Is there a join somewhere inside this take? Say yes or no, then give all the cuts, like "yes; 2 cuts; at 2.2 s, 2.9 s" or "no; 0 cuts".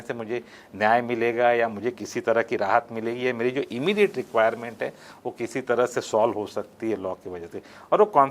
no; 0 cuts